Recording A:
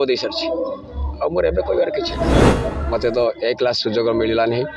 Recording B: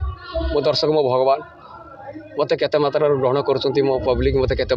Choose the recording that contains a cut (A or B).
A